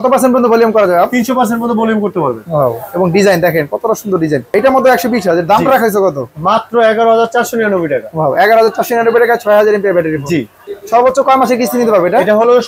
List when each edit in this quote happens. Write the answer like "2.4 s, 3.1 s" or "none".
4.5 s, 10.7 s